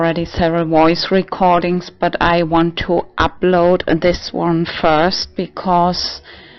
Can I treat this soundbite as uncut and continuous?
no; 1 cut; at 4.9 s

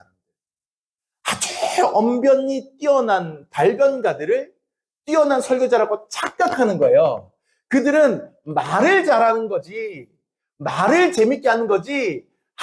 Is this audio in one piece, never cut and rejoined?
yes; 0 cuts

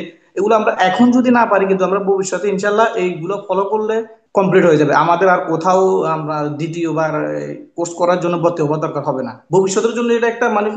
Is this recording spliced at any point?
yes; 2 cuts; at 4.2 s, 9.4 s

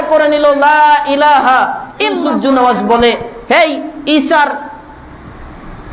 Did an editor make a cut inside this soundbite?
yes; 1 cut; at 2.2 s

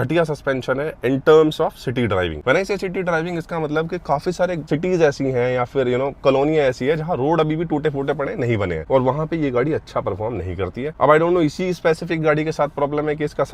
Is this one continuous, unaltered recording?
yes; 0 cuts

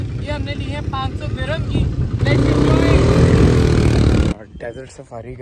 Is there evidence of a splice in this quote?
yes; 1 cut; at 4.3 s

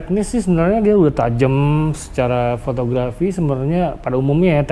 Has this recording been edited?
no; 0 cuts

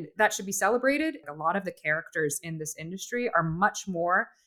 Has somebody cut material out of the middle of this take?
yes; 1 cut; at 1.2 s

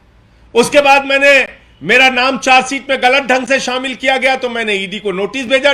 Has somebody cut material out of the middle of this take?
no; 0 cuts

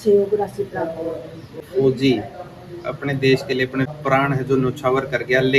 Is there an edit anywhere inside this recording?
yes; 2 cuts; at 1.7 s, 3.9 s

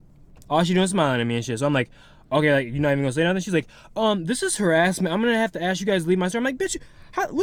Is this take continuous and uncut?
yes; 0 cuts

